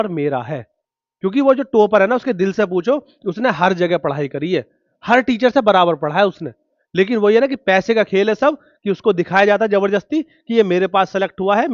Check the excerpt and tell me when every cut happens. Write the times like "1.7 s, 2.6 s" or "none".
none